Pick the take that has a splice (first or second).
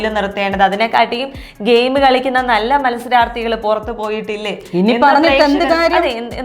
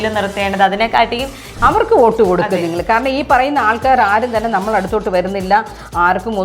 second